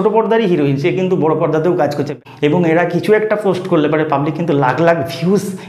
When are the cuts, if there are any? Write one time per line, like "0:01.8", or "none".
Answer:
0:02.1